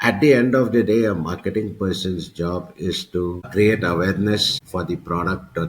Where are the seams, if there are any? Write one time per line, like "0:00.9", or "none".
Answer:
0:03.5
0:04.6